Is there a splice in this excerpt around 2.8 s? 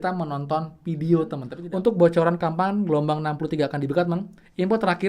no; 1 cut; at 1.5 s

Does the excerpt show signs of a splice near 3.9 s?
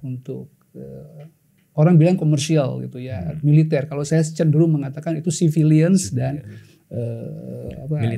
no; 0 cuts

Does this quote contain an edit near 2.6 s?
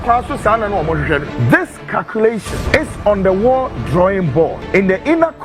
yes; 3 cuts; at 1.2 s, 2.6 s, 4.6 s

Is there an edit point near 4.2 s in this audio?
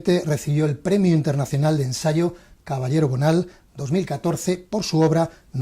yes; 1 cut; at 4.2 s

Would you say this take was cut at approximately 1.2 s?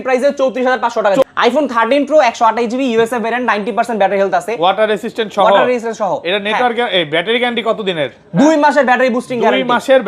yes; 1 cut; at 1.2 s

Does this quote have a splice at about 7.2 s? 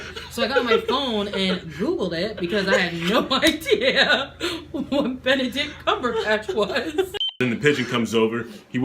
yes; 1 cut; at 7.2 s

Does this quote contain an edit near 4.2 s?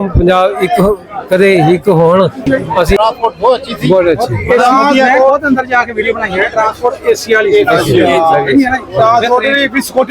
no; 1 cut; at 3.0 s

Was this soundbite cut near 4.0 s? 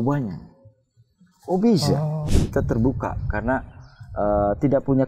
no; 1 cut; at 2.3 s

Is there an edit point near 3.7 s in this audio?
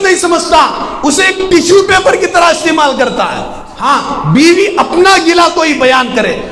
yes; 1 cut; at 3.7 s

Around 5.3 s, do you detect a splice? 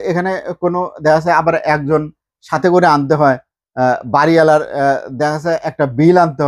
no; 0 cuts

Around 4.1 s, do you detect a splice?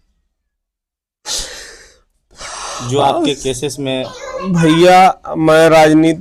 yes; 1 cut; at 4.1 s

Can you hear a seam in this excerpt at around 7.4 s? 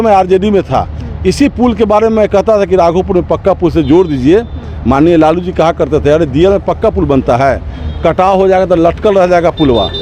no; 0 cuts

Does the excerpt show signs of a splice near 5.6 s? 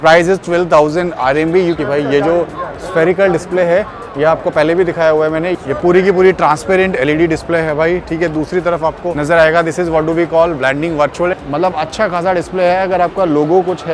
yes; 4 cuts; at 1.8 s, 5.6 s, 9.2 s, 11.4 s

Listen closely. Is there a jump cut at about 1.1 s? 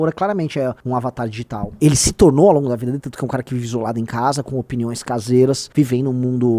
yes; 2 cuts; at 1.1 s, 5.6 s

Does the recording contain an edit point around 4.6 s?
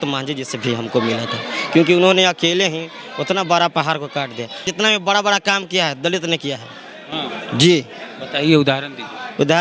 yes; 1 cut; at 4.6 s

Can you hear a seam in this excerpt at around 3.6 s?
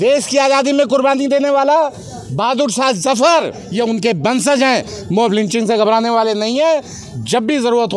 yes; 1 cut; at 3.6 s

